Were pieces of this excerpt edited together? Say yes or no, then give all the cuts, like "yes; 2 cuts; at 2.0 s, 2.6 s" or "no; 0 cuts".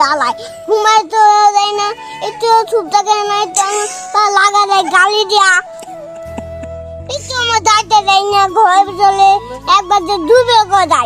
no; 0 cuts